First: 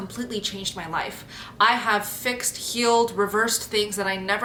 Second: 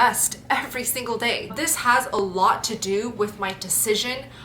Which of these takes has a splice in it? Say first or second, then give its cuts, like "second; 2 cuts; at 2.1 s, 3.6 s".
second; 1 cut; at 1.5 s